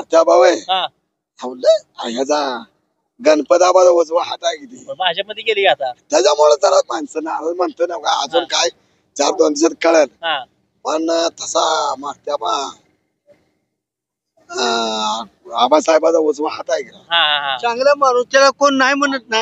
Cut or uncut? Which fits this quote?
uncut